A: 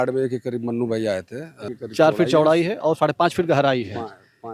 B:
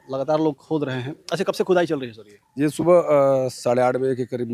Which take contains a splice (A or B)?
A